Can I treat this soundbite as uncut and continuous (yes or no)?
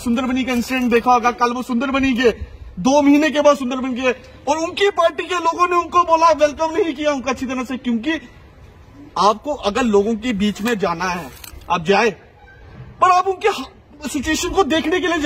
yes